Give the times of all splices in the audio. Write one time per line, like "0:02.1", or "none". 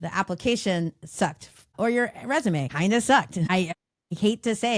0:01.7
0:02.7
0:03.8